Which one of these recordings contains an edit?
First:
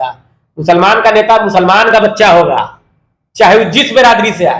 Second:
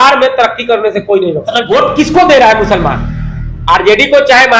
second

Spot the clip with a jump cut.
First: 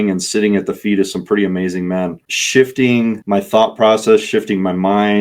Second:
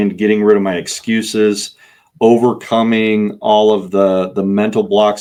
first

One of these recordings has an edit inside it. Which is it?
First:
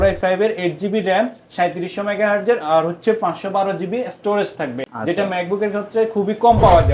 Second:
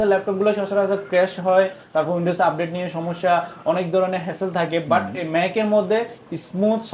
first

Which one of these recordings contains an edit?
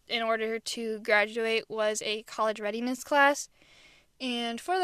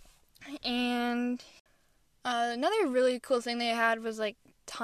second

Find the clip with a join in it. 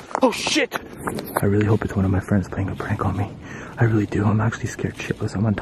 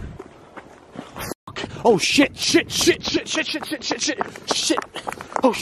first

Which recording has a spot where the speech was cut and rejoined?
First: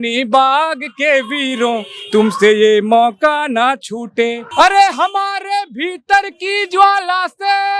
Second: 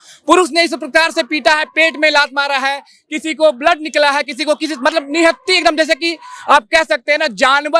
first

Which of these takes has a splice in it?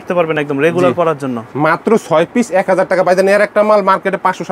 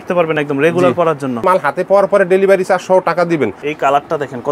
second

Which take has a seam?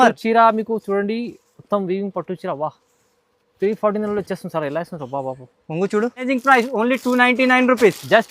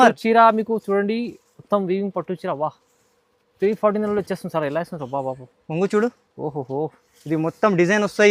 first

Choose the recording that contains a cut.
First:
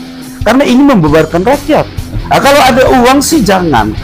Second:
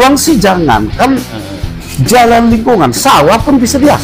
first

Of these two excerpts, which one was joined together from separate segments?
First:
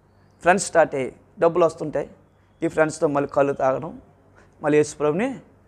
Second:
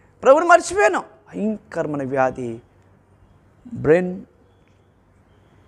second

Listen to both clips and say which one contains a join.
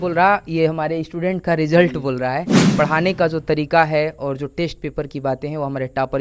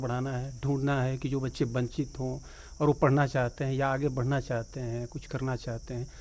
first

